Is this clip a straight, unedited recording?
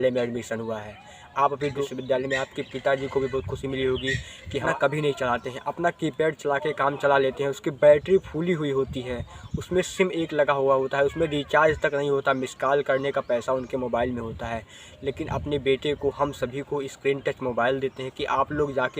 no; 2 cuts; at 1.8 s, 4.6 s

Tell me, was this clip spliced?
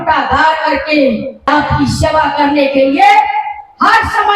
yes; 1 cut; at 1.5 s

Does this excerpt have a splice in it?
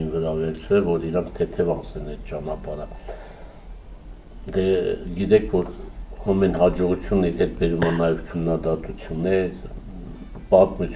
no; 0 cuts

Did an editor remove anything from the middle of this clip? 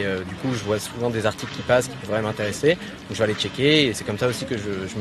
no; 0 cuts

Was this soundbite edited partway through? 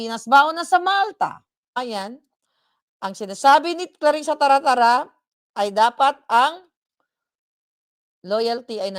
yes; 1 cut; at 1.8 s

